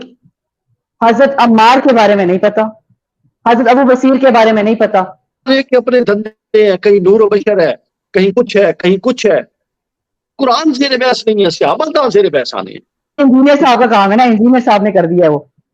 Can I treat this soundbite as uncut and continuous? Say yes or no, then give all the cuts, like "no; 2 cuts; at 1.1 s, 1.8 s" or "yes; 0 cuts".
no; 2 cuts; at 5.5 s, 13.2 s